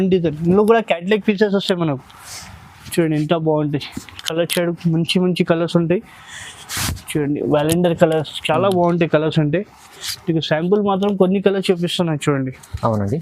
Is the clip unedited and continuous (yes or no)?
yes